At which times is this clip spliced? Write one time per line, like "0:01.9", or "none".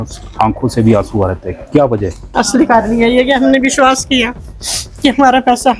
0:02.3

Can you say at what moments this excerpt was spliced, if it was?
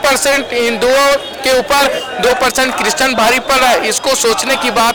none

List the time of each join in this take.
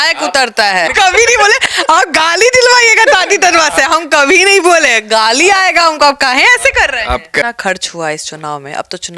0:00.9
0:07.4

